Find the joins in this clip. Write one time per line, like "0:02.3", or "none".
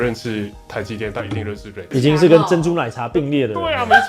0:01.8